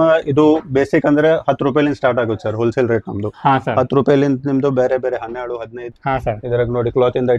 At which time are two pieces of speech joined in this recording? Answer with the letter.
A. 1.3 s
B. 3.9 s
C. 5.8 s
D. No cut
C